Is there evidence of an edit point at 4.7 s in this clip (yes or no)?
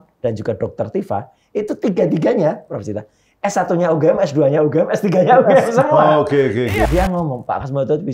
no